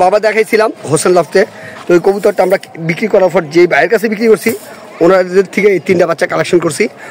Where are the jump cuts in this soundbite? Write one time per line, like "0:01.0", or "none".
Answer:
none

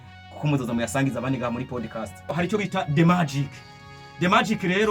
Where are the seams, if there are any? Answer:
0:02.3

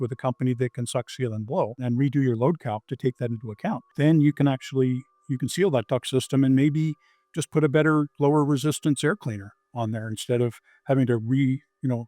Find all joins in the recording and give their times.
0:01.8
0:03.9

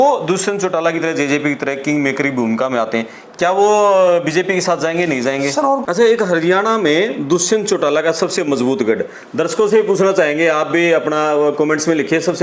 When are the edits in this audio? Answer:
0:05.9

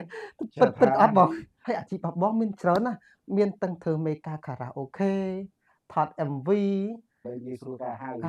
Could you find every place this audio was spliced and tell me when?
0:01.6
0:07.3

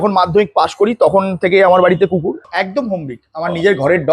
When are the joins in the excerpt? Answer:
0:02.4

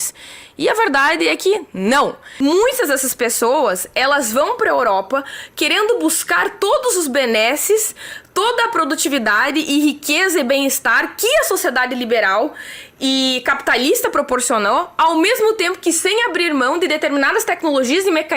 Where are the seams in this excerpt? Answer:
0:02.2

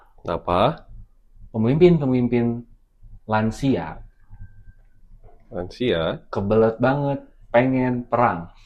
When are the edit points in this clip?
none

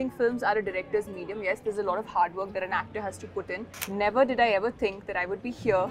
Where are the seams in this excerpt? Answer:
0:03.7

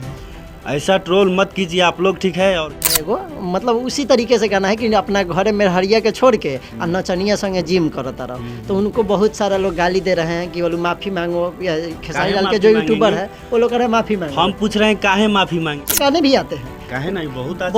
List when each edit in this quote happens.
0:02.8
0:15.9

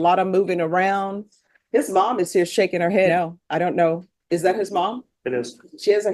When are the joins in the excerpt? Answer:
0:03.1

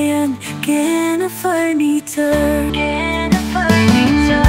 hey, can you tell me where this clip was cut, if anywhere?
none

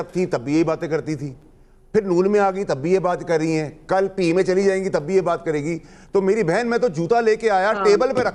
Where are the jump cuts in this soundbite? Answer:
none

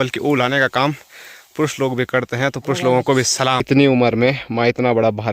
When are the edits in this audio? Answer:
0:03.6

